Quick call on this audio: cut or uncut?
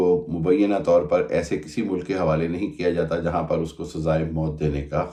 uncut